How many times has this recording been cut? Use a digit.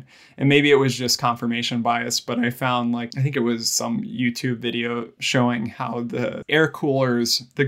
3